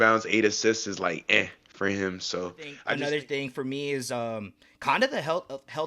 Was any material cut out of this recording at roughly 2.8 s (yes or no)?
yes